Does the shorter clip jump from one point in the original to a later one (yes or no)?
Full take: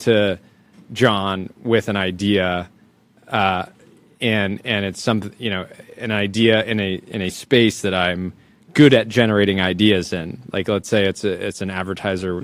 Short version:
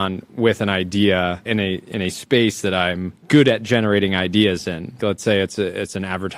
yes